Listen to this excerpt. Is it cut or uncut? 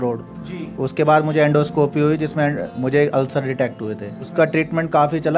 cut